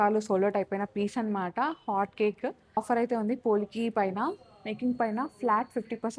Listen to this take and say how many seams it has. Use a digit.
1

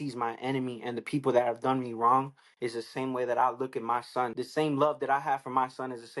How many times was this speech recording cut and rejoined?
1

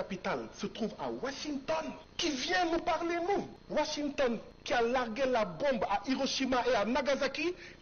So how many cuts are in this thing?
3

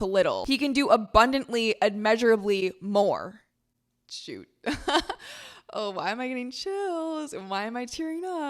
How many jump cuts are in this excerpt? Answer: 1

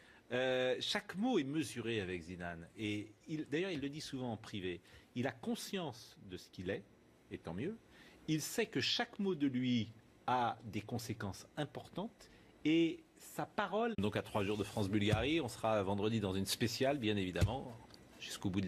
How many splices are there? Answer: 0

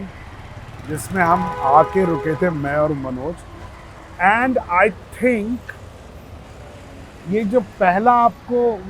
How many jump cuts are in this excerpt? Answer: 0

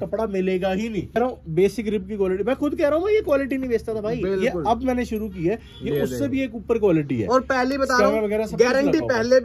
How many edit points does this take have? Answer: 1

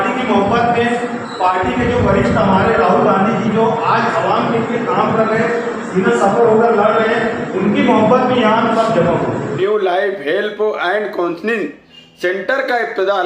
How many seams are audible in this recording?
1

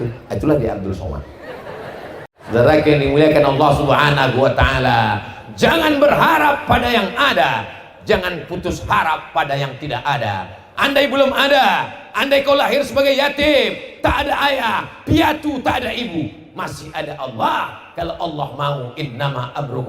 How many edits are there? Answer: 1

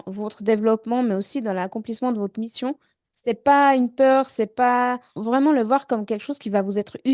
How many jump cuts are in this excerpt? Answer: 2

